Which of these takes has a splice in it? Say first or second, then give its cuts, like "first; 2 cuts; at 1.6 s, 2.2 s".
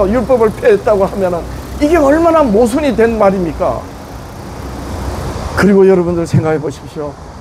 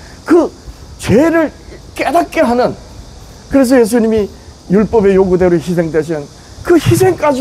first; 1 cut; at 5.3 s